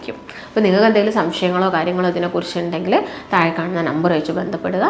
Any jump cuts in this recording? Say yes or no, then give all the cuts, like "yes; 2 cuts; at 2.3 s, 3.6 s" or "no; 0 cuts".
no; 0 cuts